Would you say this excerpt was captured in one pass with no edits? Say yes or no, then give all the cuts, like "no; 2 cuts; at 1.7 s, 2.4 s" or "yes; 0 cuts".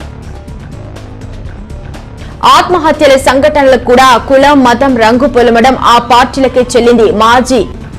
no; 1 cut; at 2.2 s